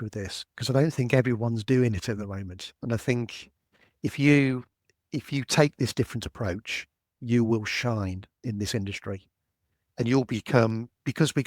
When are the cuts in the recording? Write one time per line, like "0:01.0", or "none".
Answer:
none